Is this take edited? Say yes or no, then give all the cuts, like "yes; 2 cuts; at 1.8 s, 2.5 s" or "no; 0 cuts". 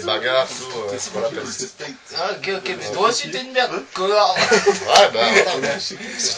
no; 0 cuts